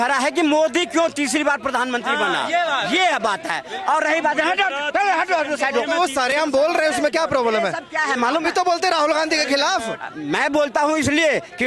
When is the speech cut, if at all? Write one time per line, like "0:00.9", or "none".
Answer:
none